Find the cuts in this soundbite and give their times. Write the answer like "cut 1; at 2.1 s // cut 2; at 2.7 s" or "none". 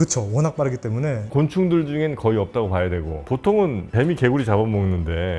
cut 1; at 3.2 s